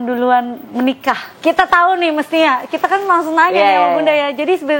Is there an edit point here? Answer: yes; 1 cut; at 1.4 s

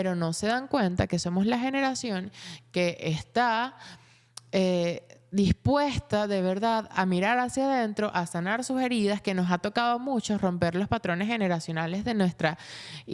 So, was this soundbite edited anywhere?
no; 0 cuts

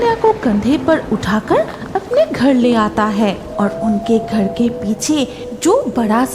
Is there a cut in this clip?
no; 0 cuts

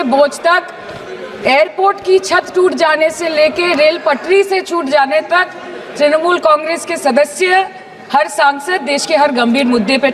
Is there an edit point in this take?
no; 0 cuts

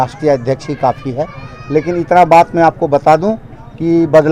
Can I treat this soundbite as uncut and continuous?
yes; 0 cuts

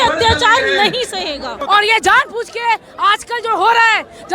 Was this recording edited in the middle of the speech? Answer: yes; 1 cut; at 1.6 s

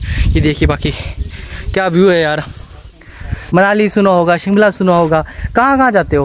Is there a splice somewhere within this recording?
yes; 1 cut; at 3.3 s

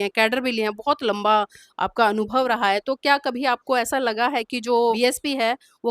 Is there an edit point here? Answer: yes; 1 cut; at 5.0 s

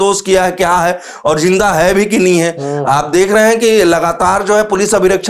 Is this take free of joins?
yes; 0 cuts

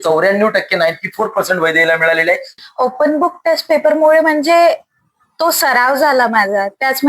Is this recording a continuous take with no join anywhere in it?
no; 1 cut; at 2.5 s

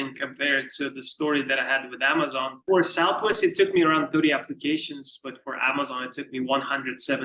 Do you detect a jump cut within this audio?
yes; 1 cut; at 2.6 s

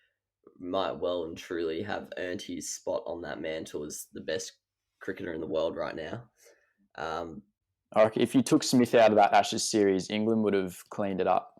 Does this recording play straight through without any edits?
no; 1 cut; at 7.5 s

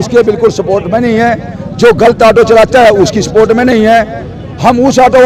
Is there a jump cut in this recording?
no; 0 cuts

